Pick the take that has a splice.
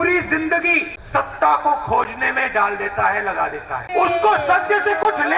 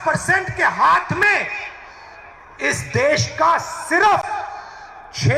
first; 2 cuts; at 0.9 s, 3.8 s

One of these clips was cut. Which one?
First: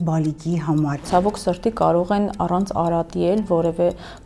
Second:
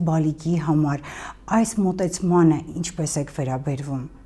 first; 1 cut; at 1.0 s

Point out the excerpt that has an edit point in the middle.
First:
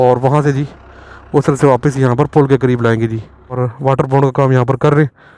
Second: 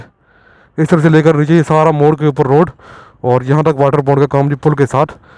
first; 1 cut; at 3.6 s

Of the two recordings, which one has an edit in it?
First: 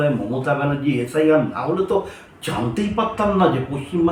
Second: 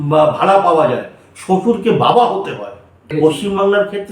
second; 1 cut; at 3.1 s

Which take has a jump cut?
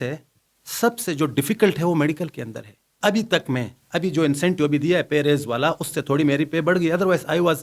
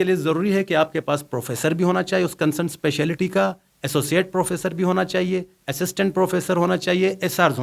first; 1 cut; at 2.9 s

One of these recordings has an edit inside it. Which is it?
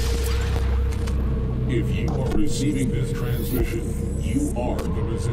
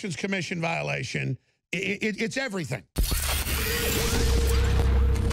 second; 1 cut; at 2.9 s

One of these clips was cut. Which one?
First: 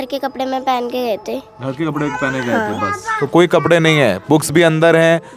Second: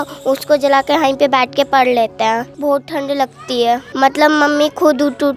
second; 2 cuts; at 2.5 s, 3.9 s

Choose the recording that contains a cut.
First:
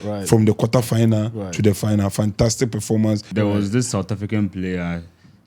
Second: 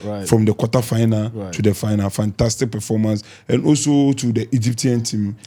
first; 1 cut; at 3.3 s

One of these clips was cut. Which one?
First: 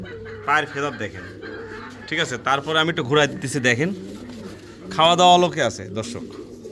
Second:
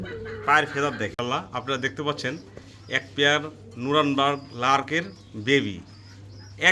second; 1 cut; at 1.1 s

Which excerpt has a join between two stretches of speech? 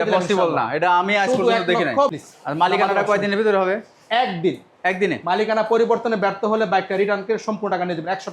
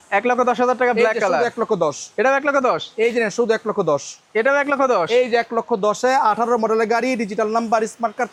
first; 1 cut; at 2.1 s

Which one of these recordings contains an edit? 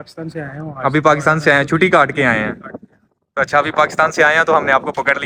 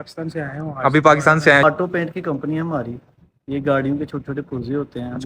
second; 1 cut; at 1.6 s

